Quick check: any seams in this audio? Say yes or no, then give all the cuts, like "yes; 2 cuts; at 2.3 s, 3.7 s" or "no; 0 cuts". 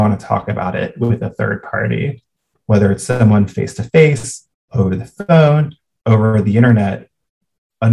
no; 0 cuts